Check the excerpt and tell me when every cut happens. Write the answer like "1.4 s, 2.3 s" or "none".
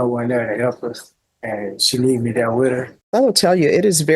2.9 s